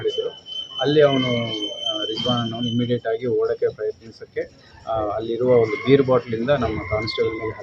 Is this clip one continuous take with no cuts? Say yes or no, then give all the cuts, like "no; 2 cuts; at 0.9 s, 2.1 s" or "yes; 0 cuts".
yes; 0 cuts